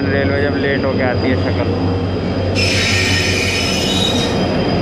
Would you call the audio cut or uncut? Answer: uncut